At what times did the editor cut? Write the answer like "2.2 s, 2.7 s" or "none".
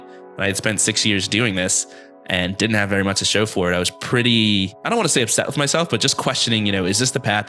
4.8 s